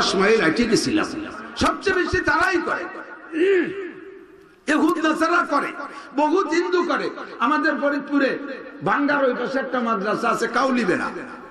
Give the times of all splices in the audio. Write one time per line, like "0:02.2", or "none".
0:01.4